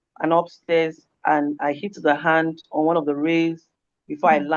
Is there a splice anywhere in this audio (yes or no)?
yes